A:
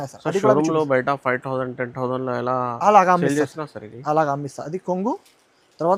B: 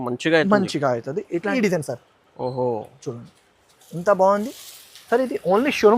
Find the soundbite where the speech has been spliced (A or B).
B